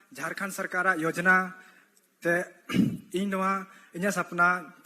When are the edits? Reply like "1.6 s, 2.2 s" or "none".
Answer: none

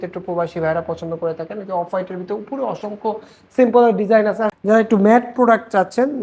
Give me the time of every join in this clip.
4.5 s

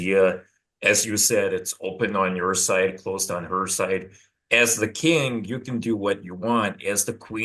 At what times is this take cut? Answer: none

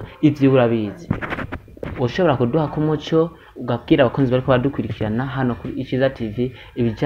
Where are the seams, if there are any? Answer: 1.9 s

